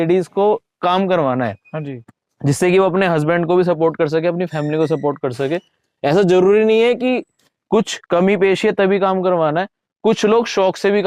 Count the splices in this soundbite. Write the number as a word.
zero